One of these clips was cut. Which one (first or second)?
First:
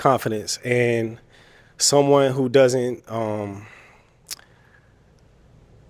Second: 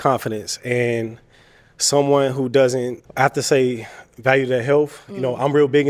second